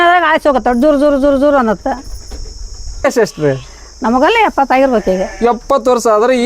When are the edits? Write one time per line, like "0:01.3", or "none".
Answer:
0:03.0